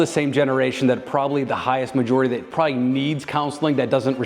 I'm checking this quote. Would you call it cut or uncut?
cut